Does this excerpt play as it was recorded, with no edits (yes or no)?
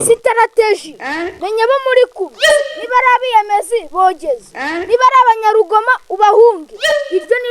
yes